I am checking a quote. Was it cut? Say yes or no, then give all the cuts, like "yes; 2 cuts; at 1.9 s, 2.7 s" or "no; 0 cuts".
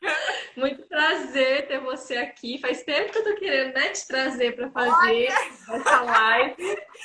no; 0 cuts